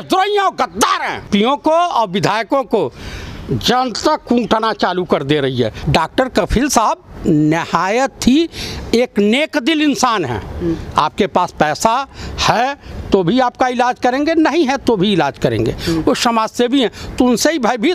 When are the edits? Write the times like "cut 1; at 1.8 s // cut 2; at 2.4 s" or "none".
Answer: cut 1; at 1.2 s // cut 2; at 5.8 s